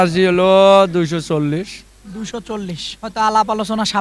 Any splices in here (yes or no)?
no